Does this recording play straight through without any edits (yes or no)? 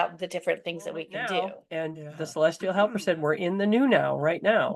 no